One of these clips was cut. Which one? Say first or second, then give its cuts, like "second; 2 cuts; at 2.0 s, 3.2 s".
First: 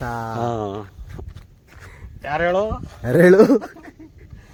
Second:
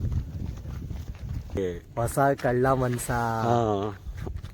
second; 1 cut; at 1.6 s